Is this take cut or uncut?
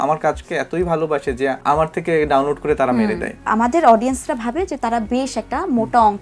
cut